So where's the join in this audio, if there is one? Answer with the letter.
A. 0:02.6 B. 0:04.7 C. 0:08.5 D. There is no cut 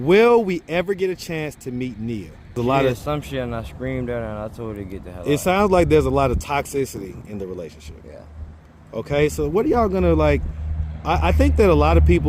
A